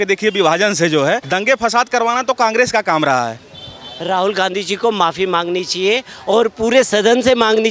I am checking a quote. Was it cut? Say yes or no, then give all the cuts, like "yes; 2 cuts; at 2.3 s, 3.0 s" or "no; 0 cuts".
yes; 2 cuts; at 1.3 s, 3.4 s